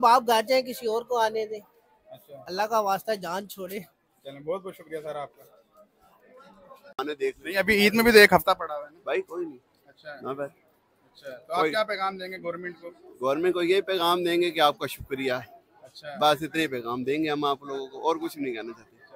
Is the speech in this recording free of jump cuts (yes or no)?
no